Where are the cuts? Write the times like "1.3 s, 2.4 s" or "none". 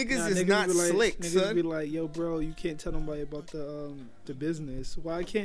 none